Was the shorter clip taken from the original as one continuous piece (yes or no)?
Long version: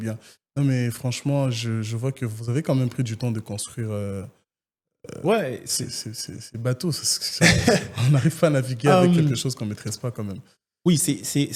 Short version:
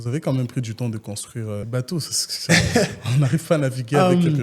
no